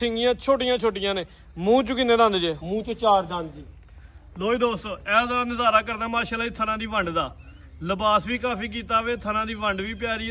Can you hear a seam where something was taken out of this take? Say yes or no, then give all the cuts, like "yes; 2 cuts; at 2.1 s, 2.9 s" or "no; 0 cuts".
no; 0 cuts